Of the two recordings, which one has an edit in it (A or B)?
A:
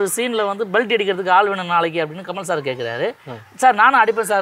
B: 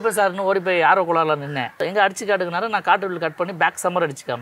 B